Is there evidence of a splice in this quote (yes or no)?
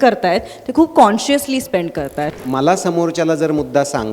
yes